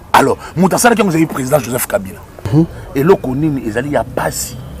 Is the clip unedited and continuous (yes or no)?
no